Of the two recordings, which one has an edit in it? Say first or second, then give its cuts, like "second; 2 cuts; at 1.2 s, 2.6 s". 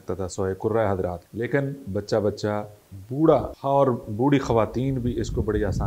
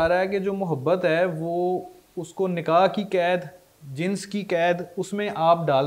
first; 2 cuts; at 1.2 s, 3.5 s